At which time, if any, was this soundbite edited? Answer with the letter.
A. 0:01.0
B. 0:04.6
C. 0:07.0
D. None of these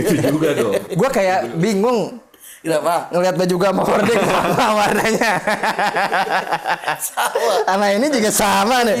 D